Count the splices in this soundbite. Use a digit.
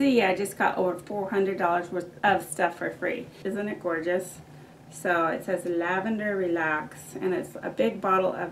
2